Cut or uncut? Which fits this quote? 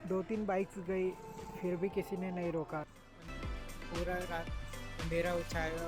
cut